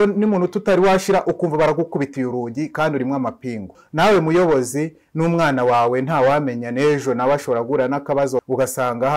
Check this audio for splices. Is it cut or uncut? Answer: cut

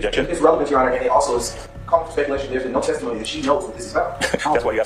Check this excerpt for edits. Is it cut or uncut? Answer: uncut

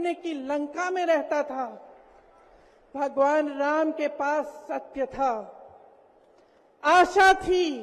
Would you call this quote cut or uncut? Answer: uncut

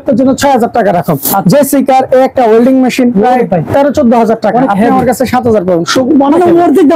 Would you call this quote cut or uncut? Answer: uncut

